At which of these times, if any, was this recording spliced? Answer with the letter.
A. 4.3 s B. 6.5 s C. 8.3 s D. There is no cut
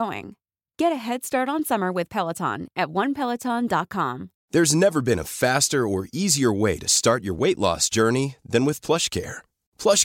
A